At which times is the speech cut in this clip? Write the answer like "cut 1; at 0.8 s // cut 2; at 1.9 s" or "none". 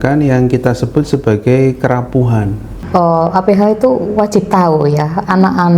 cut 1; at 2.8 s